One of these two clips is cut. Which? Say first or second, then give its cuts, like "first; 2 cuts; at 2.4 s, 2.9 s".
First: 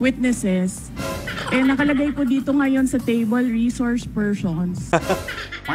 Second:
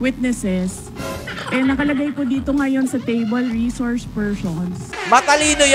second; 1 cut; at 4.8 s